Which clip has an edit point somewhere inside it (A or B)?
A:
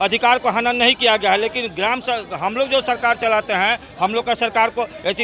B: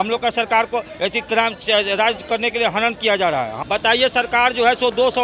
B